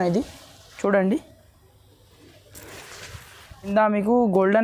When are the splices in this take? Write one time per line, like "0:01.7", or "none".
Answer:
0:03.7